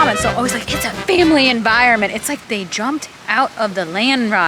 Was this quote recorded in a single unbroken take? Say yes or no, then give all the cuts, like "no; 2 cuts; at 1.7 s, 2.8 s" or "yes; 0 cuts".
no; 1 cut; at 2.4 s